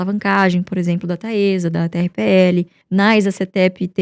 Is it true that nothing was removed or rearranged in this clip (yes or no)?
no